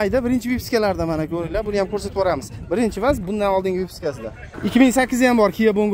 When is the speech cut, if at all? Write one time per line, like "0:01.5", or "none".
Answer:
0:04.4